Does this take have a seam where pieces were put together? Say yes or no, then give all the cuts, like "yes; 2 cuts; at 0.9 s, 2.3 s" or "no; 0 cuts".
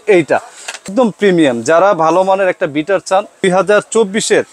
yes; 2 cuts; at 0.9 s, 3.4 s